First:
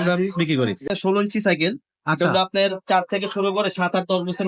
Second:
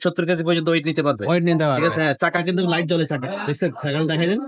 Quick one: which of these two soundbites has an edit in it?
first; 1 cut; at 0.9 s

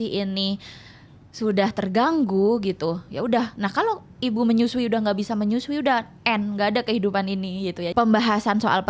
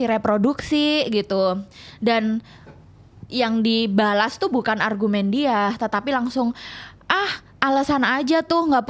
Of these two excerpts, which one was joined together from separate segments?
first; 1 cut; at 7.8 s

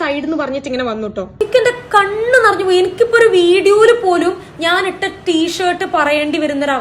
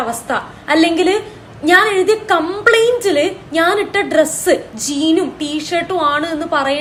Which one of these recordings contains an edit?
first; 1 cut; at 1.4 s

